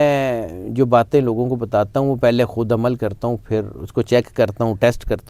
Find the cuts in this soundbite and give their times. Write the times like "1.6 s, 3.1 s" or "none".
none